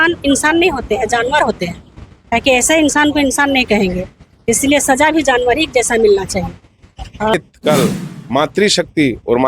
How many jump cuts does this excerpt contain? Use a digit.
1